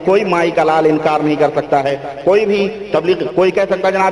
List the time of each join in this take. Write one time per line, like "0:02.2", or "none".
none